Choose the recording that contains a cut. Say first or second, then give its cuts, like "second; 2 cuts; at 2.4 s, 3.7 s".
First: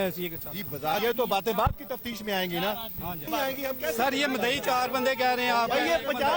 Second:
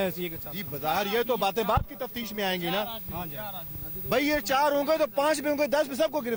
first; 2 cuts; at 1.0 s, 3.2 s